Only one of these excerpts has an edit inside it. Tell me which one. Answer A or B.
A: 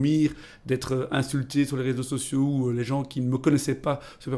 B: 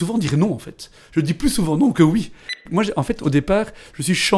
B